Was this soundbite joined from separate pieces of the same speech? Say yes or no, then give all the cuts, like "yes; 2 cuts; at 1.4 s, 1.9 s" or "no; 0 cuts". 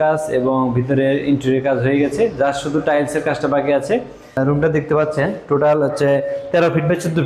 yes; 1 cut; at 4.4 s